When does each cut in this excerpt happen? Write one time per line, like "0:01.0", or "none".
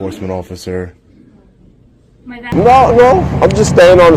0:02.5